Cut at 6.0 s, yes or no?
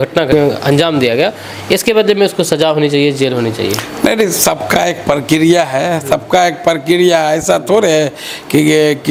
no